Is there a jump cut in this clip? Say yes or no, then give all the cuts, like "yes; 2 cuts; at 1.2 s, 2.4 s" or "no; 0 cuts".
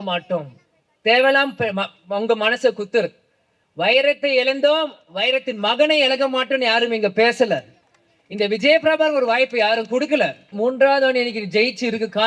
yes; 1 cut; at 10.5 s